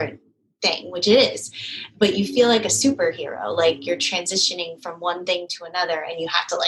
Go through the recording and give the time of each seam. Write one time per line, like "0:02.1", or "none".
none